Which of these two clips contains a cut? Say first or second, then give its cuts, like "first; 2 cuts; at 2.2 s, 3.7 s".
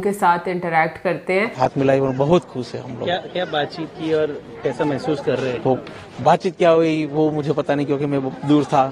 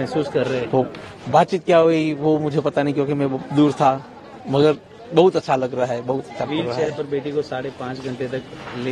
first; 1 cut; at 1.5 s